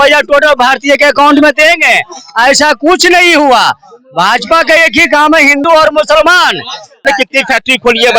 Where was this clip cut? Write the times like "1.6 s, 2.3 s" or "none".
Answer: 7.0 s

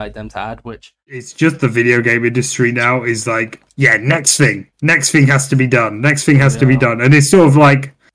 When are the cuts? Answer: 1.2 s

